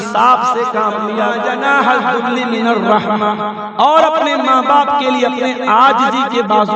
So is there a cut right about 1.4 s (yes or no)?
yes